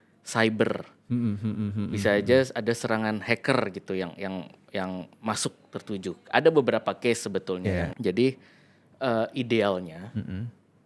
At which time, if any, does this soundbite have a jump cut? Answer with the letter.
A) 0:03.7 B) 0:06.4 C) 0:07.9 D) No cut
C